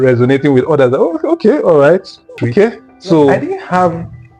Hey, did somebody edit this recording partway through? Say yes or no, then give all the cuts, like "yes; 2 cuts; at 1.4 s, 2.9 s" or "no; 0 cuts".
yes; 1 cut; at 3.4 s